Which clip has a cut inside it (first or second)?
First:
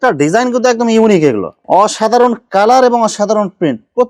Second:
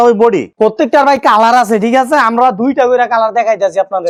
first